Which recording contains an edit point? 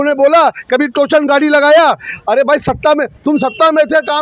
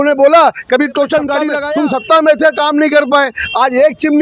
second; 1 cut; at 1.6 s

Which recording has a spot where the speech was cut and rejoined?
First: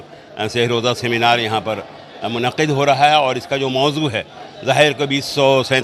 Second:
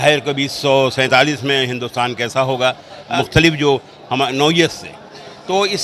second; 1 cut; at 3.0 s

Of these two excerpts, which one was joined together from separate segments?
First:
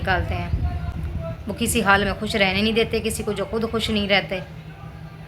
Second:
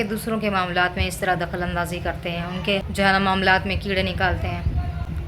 second; 1 cut; at 2.9 s

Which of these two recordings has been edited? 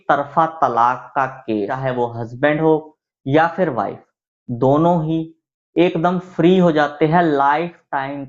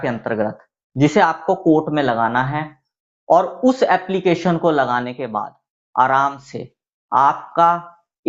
first; 1 cut; at 1.7 s

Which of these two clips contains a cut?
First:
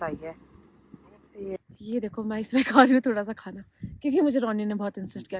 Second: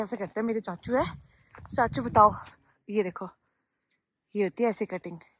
first; 1 cut; at 1.6 s

